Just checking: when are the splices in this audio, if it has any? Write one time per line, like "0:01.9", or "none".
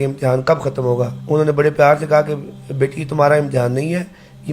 0:01.2